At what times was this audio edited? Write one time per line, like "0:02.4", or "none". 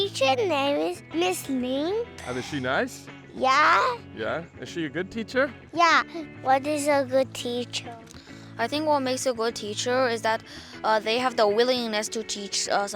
0:01.0
0:02.2
0:06.2

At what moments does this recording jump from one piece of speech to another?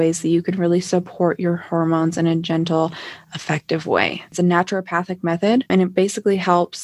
0:04.3
0:05.7

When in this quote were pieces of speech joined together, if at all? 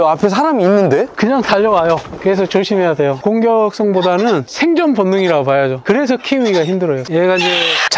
0:02.1
0:05.8
0:07.0

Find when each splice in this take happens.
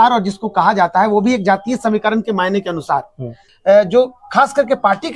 0:03.4

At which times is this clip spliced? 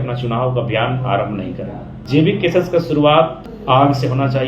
0:01.9
0:03.5

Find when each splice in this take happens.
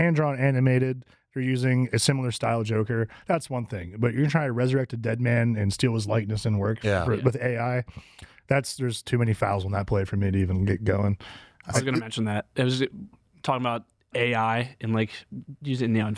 none

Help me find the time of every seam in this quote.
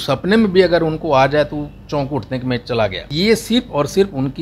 0:03.0

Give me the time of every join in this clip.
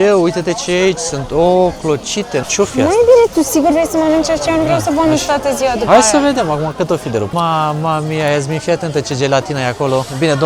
0:02.5
0:07.3

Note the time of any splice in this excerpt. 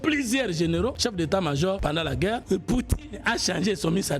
0:01.0
0:01.9

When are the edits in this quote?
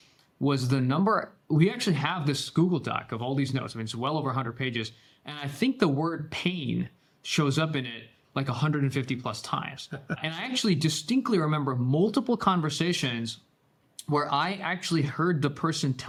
none

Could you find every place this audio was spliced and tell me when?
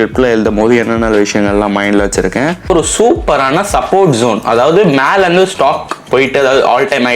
0:02.7

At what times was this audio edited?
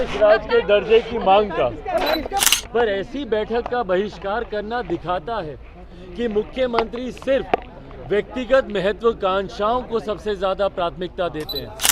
0:02.4

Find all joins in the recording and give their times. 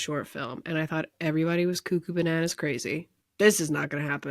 0:03.2

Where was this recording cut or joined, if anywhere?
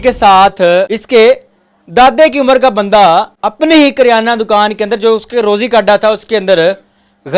0:01.0
0:03.4

